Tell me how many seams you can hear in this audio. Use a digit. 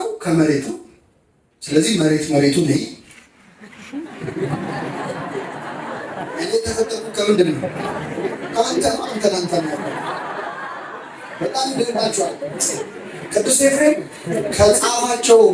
0